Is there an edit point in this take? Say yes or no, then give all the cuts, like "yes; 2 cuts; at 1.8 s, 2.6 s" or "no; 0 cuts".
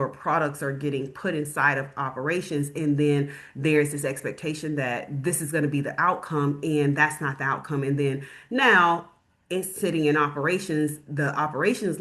no; 0 cuts